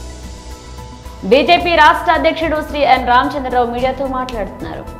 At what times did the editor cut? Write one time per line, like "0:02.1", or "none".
0:01.0